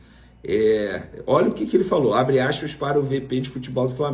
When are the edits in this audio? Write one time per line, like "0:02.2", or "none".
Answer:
none